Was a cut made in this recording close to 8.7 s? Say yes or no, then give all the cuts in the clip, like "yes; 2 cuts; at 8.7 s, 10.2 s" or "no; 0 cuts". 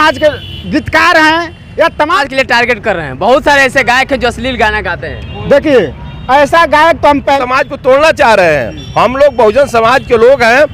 no; 2 cuts; at 2.2 s, 7.4 s